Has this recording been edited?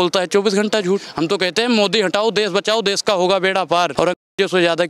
yes; 2 cuts; at 1.1 s, 3.9 s

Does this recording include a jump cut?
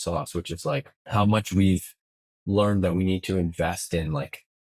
yes; 1 cut; at 1.0 s

